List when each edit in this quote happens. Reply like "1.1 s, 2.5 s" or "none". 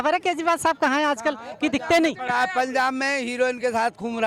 none